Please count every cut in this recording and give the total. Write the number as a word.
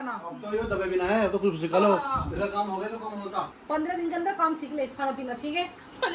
one